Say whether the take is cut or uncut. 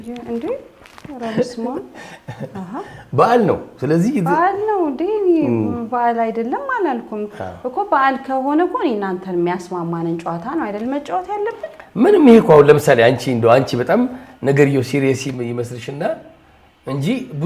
uncut